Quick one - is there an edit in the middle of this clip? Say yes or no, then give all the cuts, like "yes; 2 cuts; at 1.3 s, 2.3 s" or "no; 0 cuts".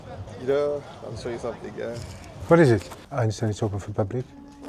yes; 1 cut; at 3.0 s